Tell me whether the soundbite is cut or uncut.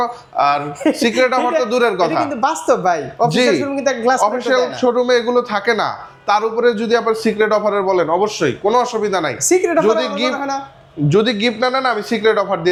uncut